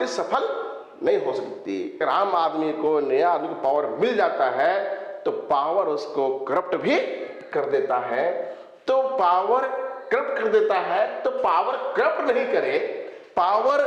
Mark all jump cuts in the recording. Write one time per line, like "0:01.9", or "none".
0:02.0